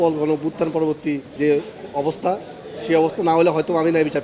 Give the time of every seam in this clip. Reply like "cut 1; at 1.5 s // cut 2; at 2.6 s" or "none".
cut 1; at 1.3 s